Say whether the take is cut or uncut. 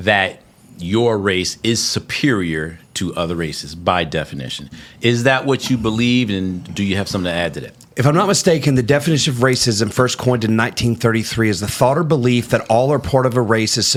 uncut